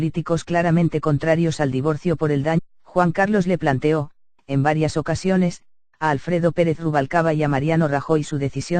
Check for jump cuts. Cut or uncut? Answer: uncut